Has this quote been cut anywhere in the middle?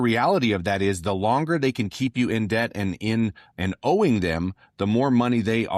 no; 0 cuts

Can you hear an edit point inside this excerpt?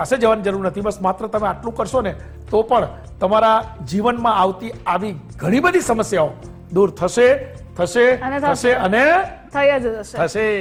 no; 0 cuts

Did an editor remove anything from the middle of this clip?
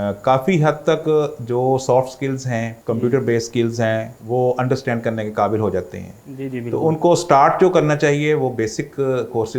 yes; 2 cuts; at 2.7 s, 4.1 s

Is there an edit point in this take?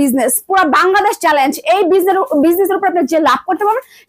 no; 0 cuts

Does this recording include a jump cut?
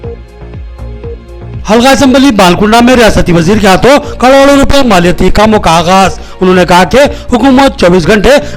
yes; 1 cut; at 1.3 s

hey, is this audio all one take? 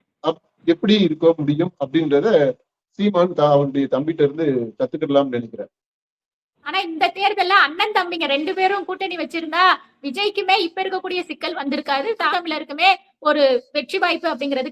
no; 2 cuts; at 6.5 s, 12.3 s

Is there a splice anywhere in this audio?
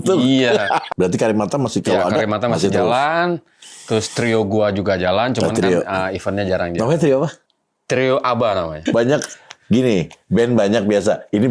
yes; 3 cuts; at 0.9 s, 7.4 s, 8.8 s

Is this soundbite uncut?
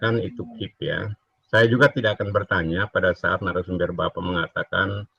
yes; 0 cuts

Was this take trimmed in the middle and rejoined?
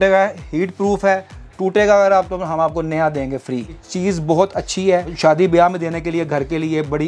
yes; 2 cuts; at 3.8 s, 5.1 s

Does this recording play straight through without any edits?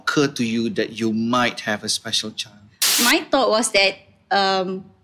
no; 1 cut; at 2.8 s

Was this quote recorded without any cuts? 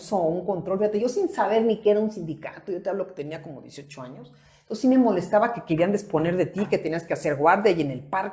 yes; 0 cuts

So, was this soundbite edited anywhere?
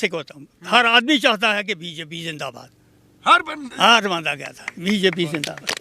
no; 0 cuts

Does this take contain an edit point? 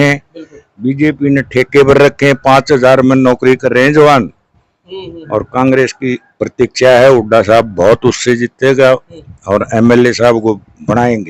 no; 0 cuts

